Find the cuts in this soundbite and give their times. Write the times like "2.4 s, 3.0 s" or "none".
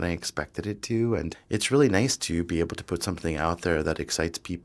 1.4 s